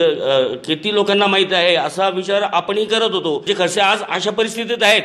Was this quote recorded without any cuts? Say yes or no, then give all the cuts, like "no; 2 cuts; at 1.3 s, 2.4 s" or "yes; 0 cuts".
no; 1 cut; at 3.4 s